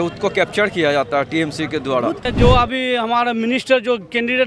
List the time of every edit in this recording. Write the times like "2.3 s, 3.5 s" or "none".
2.2 s